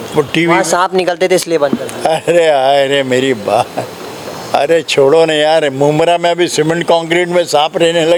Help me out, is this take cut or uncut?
uncut